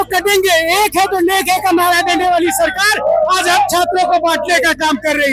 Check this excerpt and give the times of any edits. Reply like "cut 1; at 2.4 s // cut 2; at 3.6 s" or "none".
none